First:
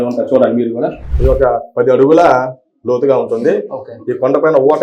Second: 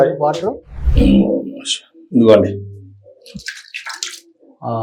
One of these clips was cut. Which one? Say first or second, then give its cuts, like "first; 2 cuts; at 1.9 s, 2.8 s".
first; 1 cut; at 1.1 s